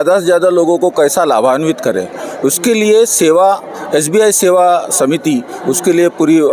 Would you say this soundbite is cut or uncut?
uncut